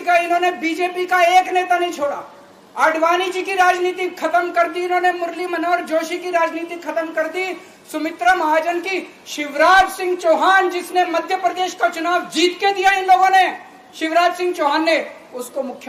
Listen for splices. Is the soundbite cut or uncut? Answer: uncut